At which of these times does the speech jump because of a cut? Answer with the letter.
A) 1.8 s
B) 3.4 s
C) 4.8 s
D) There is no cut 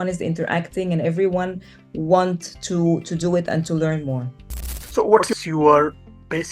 C